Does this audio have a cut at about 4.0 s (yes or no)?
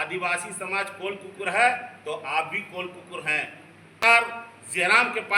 yes